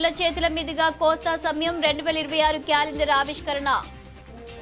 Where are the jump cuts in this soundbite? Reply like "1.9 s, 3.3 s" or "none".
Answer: none